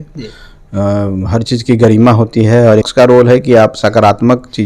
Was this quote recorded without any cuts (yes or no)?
no